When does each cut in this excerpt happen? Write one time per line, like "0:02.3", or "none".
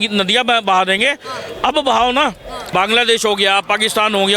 0:02.5